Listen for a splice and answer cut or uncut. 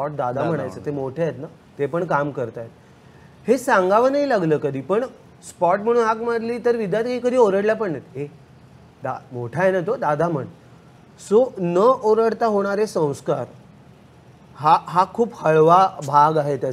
uncut